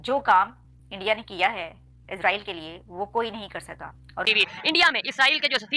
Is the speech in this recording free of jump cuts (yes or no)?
no